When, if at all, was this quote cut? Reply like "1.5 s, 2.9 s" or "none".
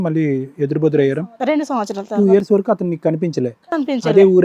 1.3 s